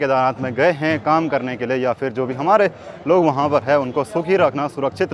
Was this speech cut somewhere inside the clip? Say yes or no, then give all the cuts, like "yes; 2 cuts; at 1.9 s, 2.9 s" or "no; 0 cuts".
no; 0 cuts